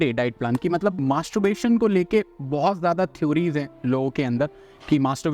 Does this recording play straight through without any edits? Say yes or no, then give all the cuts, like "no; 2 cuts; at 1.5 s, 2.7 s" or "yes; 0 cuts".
no; 1 cut; at 1.0 s